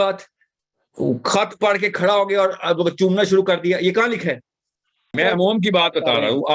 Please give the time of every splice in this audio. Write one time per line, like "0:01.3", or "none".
0:05.1